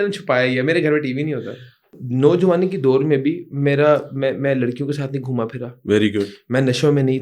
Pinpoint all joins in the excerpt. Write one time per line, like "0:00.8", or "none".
0:02.0